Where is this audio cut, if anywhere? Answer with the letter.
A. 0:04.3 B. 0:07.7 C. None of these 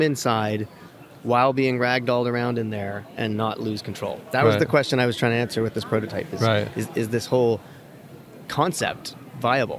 C